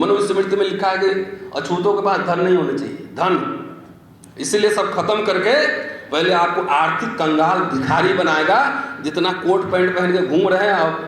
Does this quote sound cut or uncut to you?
uncut